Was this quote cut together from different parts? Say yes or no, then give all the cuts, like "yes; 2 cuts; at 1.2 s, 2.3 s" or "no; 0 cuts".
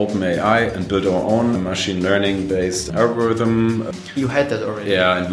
yes; 3 cuts; at 1.6 s, 2.9 s, 3.9 s